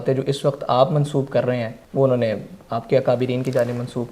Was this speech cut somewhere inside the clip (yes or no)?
yes